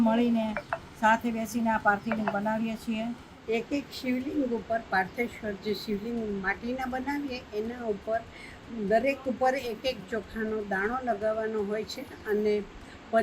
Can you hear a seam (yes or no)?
yes